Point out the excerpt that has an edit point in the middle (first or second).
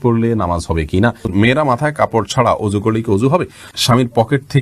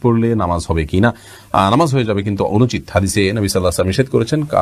first